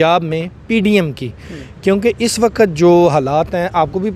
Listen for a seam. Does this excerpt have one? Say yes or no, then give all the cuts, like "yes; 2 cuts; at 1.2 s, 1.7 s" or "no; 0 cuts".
no; 0 cuts